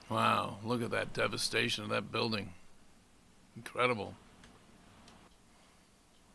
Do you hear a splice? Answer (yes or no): yes